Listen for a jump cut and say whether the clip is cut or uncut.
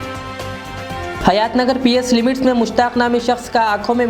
cut